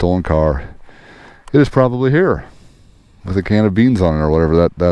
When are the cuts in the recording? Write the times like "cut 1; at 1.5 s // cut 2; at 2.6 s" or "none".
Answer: none